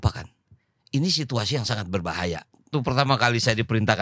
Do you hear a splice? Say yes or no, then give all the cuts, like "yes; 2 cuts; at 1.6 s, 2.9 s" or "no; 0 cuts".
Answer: yes; 1 cut; at 2.7 s